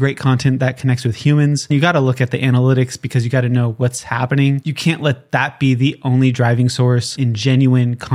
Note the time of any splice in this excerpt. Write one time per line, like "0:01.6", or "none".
0:04.7
0:07.1